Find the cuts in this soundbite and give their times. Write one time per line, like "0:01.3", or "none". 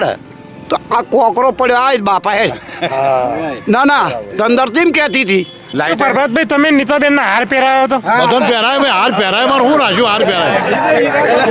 0:05.6